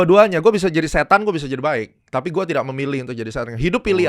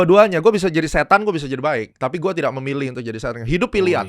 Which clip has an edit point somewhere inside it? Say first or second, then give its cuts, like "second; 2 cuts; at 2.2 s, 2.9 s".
second; 1 cut; at 1.9 s